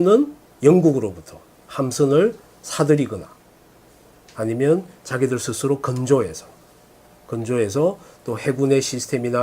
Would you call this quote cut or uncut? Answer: cut